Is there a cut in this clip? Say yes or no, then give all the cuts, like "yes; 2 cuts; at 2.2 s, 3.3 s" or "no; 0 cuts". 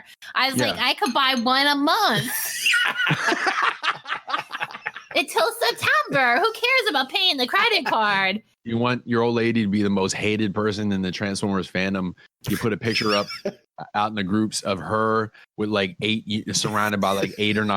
yes; 1 cut; at 8.5 s